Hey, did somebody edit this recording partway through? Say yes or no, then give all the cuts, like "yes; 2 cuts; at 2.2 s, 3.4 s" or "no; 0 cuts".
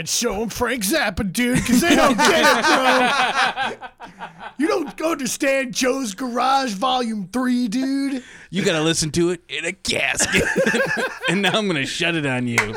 no; 0 cuts